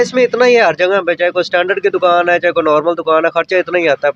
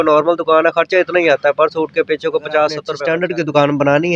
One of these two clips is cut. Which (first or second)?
second